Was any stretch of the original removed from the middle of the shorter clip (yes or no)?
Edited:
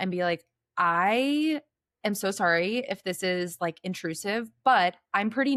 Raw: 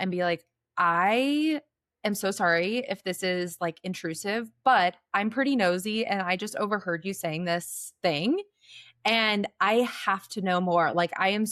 no